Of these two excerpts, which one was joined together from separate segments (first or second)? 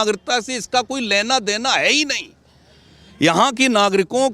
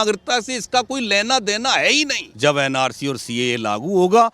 second